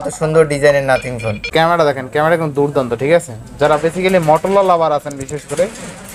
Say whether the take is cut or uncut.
cut